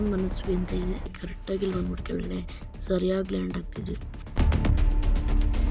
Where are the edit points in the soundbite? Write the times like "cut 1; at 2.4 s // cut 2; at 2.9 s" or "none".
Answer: cut 1; at 1.2 s

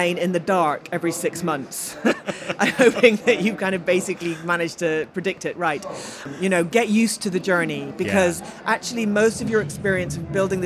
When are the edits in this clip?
cut 1; at 6.2 s

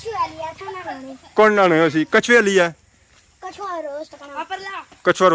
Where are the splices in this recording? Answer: none

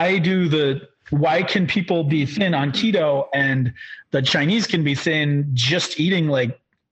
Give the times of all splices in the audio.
none

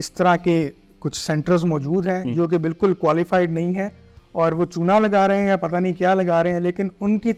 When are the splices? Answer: none

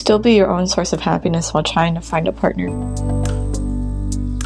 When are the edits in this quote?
cut 1; at 2.7 s

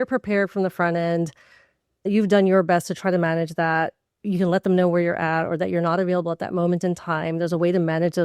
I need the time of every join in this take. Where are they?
cut 1; at 2.1 s

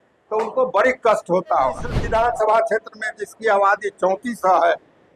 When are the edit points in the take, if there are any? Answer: cut 1; at 1.9 s

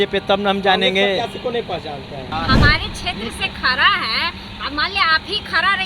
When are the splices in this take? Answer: cut 1; at 2.3 s

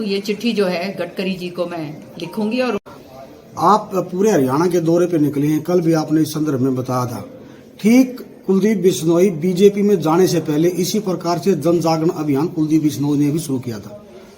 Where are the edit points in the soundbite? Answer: cut 1; at 2.8 s

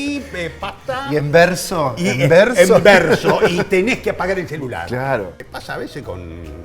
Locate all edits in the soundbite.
cut 1; at 5.3 s

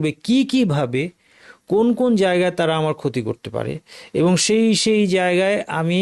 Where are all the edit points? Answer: none

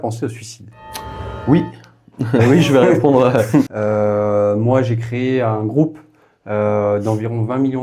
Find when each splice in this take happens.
cut 1; at 3.7 s

